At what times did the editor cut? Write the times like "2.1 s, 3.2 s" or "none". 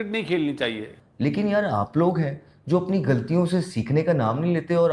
1.0 s